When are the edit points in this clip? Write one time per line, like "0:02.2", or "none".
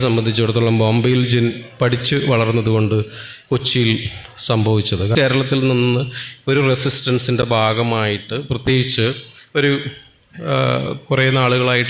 0:05.1